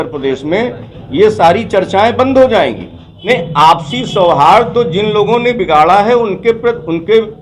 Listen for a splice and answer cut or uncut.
cut